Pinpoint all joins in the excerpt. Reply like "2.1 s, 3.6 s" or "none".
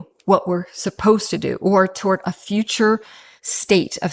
none